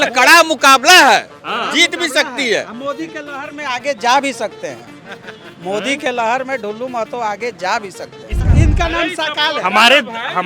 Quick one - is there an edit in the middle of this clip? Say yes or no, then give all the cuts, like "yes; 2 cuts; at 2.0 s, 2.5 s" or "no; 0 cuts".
yes; 1 cut; at 8.4 s